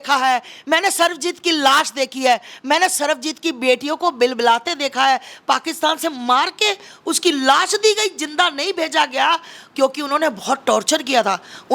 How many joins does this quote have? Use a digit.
0